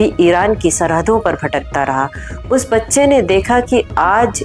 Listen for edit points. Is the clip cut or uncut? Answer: uncut